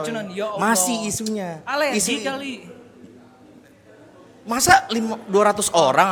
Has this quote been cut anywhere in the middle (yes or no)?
no